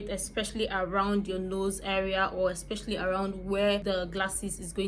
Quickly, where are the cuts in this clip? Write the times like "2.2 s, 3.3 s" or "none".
3.8 s